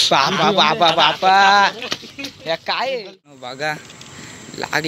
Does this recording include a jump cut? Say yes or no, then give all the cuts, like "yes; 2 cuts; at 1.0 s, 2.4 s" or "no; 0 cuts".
yes; 1 cut; at 3.3 s